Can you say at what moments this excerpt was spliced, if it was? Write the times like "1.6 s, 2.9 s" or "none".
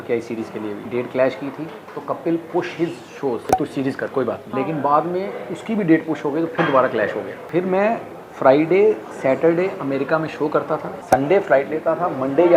0.9 s, 3.4 s, 4.5 s, 7.4 s, 10.9 s